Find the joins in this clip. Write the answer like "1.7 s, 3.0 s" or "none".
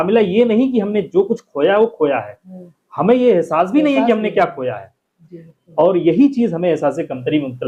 none